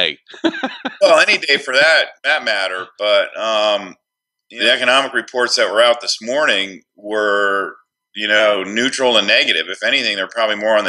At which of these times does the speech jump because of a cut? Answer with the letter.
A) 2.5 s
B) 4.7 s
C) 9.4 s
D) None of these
D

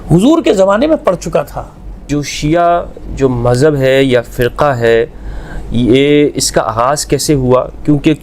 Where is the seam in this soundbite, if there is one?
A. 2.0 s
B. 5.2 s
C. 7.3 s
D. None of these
A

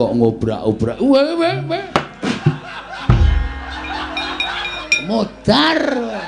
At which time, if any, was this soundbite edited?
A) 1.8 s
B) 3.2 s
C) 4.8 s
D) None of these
C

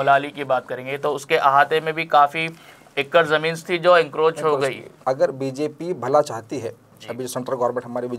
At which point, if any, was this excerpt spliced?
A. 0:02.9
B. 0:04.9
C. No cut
B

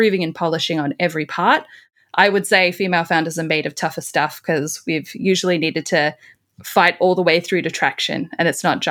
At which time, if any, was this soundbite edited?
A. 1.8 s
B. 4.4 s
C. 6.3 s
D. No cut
A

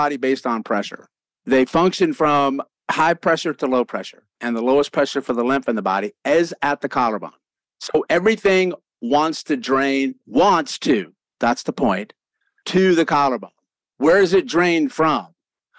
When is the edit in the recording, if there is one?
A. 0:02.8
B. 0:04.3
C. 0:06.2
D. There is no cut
B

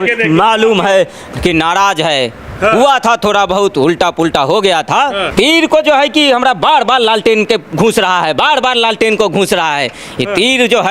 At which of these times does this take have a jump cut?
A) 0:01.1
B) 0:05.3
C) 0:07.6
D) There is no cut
B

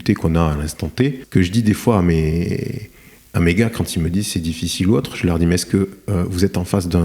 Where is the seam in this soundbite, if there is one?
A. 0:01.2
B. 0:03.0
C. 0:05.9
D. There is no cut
A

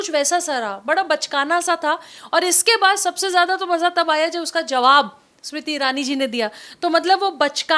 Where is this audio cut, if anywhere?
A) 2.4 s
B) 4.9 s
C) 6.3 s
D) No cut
D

